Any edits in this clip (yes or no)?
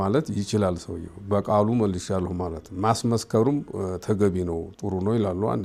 no